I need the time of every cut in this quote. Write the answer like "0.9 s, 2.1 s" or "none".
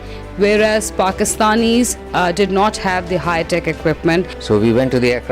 4.4 s

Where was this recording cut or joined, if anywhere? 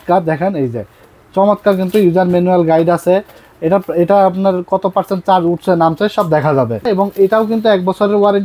6.9 s

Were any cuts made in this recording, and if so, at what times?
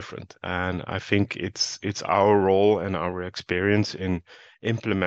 none

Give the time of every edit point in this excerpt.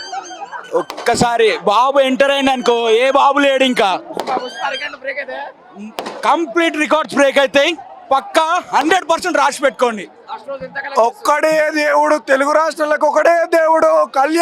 none

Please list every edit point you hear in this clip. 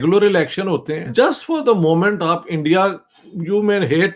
1.0 s

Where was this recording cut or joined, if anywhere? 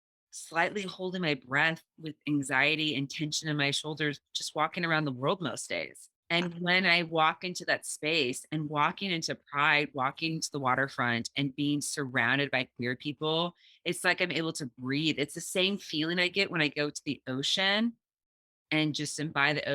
none

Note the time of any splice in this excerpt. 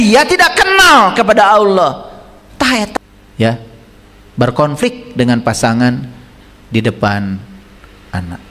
2.9 s

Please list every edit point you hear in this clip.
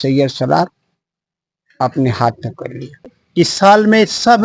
3.2 s

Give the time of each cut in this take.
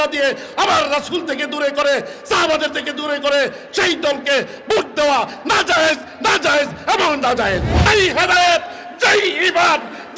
7.7 s

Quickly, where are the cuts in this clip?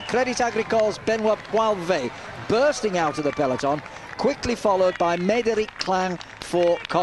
4.1 s

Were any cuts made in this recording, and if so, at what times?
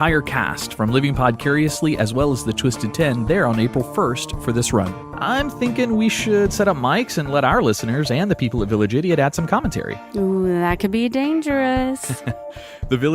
2.8 s

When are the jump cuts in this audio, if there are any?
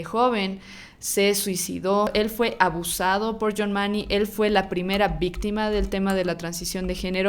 2.1 s

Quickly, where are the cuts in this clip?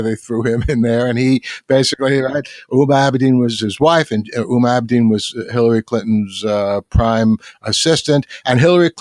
3.6 s

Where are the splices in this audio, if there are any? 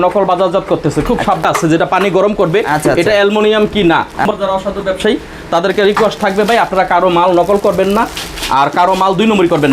1.4 s, 4.3 s

